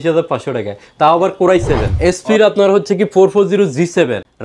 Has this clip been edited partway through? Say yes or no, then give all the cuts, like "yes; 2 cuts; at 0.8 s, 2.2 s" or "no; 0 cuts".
no; 0 cuts